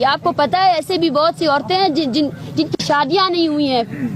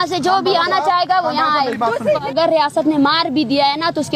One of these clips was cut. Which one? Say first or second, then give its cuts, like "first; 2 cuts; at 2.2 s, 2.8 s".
second; 1 cut; at 2.3 s